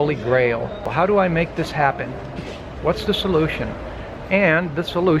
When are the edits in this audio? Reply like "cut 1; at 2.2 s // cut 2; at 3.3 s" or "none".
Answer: cut 1; at 0.9 s